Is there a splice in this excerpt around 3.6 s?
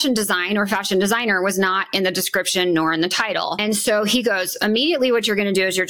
yes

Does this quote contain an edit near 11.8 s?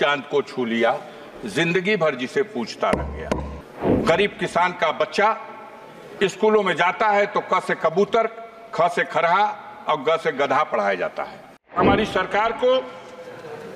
yes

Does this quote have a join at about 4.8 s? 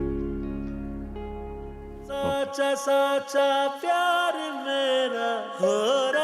no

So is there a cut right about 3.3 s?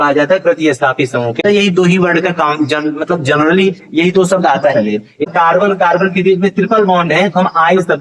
no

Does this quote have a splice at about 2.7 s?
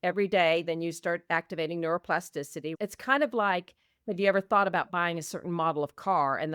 yes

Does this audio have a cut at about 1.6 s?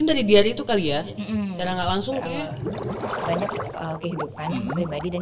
no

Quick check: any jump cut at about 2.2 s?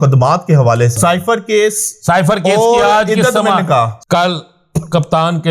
no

